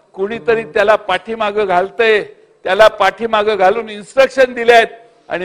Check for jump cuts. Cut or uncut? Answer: uncut